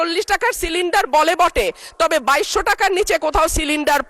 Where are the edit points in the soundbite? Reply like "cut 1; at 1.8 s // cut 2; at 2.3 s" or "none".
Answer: none